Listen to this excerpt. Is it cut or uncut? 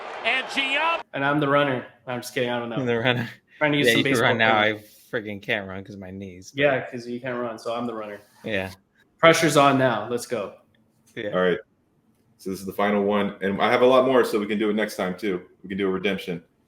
cut